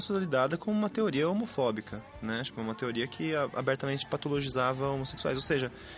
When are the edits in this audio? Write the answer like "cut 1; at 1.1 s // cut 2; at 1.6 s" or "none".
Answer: none

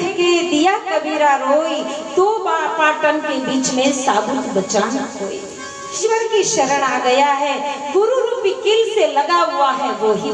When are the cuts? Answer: cut 1; at 5.9 s

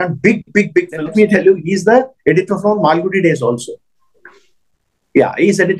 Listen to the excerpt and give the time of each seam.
cut 1; at 1.1 s

